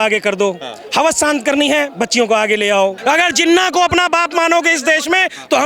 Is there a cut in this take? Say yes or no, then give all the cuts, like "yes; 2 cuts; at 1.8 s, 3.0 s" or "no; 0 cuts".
yes; 1 cut; at 3.0 s